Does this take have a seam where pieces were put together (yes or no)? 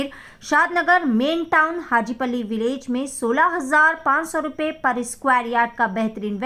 no